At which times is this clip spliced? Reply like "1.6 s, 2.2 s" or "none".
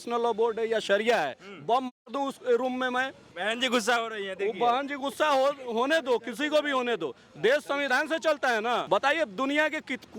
3.3 s, 8.8 s